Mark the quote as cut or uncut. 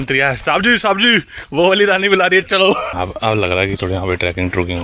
cut